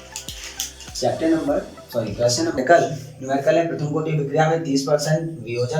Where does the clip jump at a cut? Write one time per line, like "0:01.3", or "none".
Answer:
0:02.6